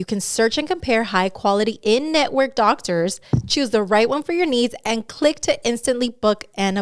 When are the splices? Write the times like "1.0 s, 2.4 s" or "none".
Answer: none